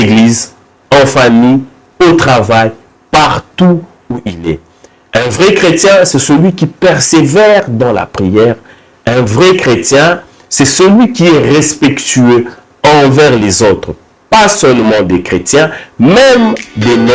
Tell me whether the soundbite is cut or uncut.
uncut